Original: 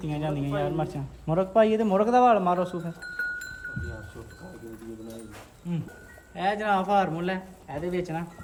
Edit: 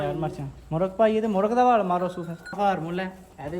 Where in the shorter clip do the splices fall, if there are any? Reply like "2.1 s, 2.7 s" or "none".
2.5 s